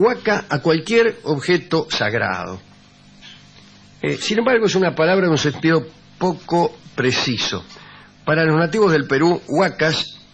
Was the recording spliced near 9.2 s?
yes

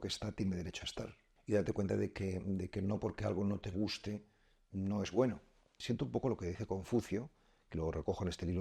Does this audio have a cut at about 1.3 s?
yes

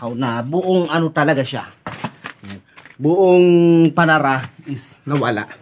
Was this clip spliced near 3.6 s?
no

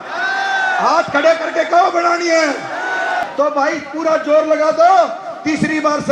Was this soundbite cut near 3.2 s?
yes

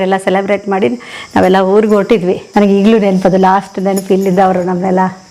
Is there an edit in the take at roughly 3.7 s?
no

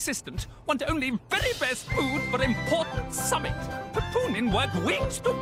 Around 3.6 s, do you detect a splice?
no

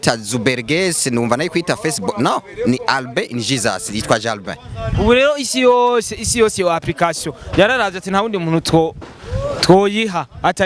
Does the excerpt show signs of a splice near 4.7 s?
no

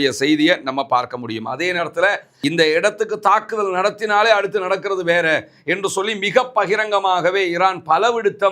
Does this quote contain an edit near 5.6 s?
no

